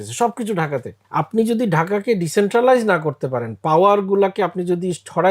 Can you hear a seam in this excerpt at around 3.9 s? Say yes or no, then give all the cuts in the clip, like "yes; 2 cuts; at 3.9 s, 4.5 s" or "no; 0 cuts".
no; 1 cut; at 1.0 s